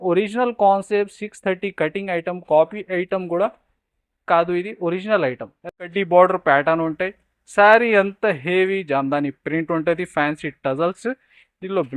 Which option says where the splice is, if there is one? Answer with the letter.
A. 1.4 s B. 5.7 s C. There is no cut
B